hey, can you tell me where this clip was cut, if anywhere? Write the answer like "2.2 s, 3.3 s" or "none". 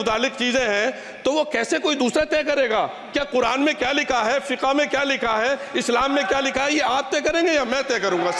none